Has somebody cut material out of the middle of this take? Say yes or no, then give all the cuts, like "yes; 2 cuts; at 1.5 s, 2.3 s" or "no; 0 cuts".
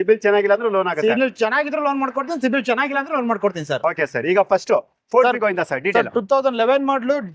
no; 0 cuts